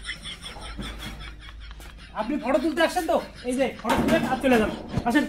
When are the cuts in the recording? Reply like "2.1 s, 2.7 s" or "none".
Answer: none